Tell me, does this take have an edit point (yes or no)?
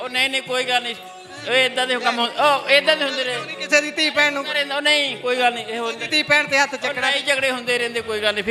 no